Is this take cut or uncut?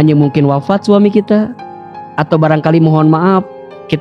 uncut